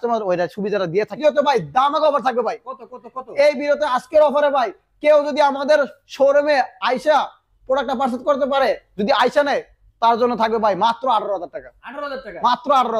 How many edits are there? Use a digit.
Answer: 1